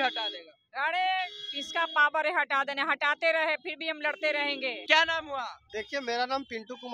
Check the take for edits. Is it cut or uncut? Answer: cut